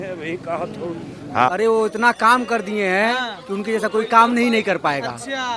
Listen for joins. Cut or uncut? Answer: cut